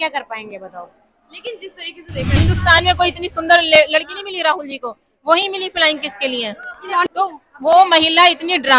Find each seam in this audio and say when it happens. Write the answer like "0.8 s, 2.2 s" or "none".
2.3 s, 7.1 s